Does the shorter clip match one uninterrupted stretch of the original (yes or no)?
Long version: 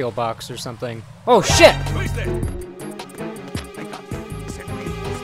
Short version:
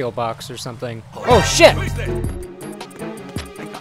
no